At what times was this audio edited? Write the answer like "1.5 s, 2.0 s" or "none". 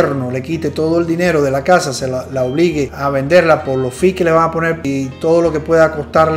2.9 s